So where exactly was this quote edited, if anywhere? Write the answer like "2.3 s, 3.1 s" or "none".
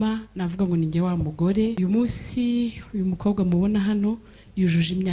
1.8 s